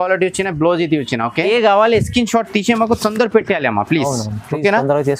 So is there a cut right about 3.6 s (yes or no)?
no